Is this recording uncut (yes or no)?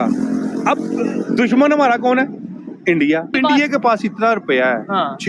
no